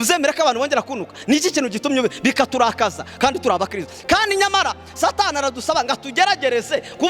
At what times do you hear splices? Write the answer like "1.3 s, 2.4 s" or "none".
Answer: none